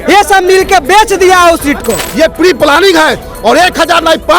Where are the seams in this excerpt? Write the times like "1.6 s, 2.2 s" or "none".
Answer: 2.0 s